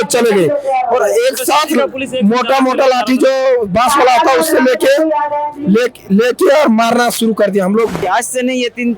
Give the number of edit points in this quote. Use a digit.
1